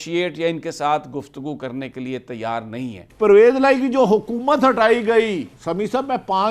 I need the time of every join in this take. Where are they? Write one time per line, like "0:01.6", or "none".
0:03.0
0:05.5